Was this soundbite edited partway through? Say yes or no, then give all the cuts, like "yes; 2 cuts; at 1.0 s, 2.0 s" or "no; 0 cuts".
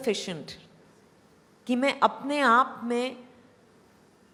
no; 0 cuts